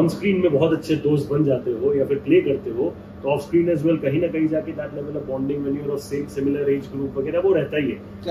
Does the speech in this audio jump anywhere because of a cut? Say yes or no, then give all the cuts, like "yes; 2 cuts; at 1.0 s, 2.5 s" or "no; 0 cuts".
no; 0 cuts